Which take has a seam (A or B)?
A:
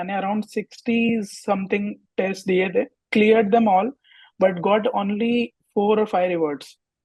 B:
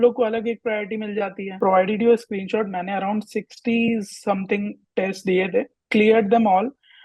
B